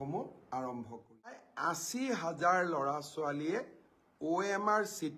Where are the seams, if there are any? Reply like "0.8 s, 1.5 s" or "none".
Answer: 1.5 s

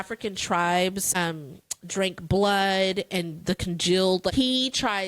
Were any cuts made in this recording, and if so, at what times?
1.1 s, 4.3 s

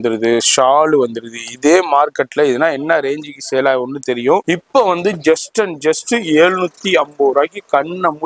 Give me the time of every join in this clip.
4.4 s

